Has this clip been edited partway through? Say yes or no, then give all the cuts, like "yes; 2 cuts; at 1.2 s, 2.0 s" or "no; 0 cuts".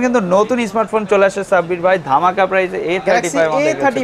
no; 0 cuts